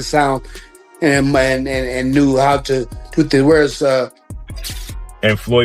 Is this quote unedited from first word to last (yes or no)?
no